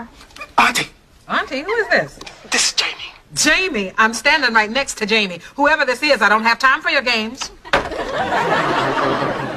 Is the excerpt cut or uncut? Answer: uncut